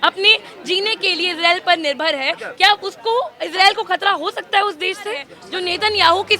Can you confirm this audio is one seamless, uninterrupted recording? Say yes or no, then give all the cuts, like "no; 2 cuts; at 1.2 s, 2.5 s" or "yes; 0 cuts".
no; 2 cuts; at 3.4 s, 5.4 s